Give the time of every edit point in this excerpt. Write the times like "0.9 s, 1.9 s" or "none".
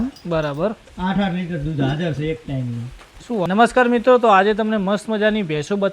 3.5 s